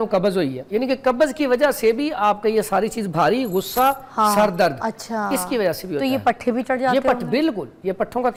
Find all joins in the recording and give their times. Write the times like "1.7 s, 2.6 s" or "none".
none